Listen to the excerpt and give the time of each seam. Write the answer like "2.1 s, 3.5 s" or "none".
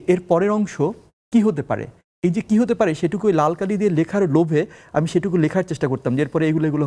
none